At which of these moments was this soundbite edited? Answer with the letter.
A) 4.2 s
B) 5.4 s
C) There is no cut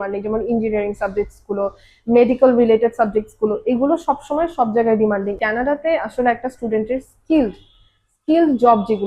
B